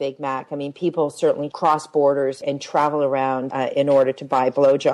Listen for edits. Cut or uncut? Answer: cut